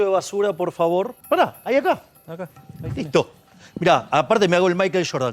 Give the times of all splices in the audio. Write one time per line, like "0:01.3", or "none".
0:01.2